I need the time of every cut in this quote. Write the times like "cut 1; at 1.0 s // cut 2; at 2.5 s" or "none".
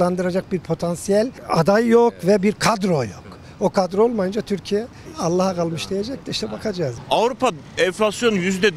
cut 1; at 1.4 s // cut 2; at 5.0 s // cut 3; at 7.0 s // cut 4; at 7.6 s